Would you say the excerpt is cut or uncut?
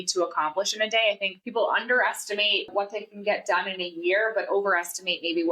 cut